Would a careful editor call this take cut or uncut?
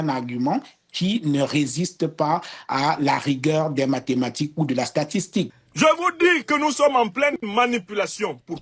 cut